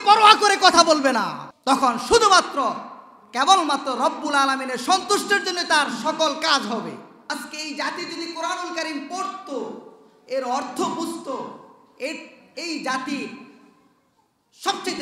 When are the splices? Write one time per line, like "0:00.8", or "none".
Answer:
none